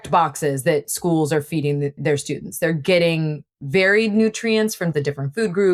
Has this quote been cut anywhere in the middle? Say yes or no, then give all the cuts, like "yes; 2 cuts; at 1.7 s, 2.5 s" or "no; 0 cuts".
no; 0 cuts